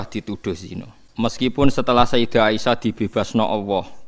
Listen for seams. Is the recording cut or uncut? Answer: cut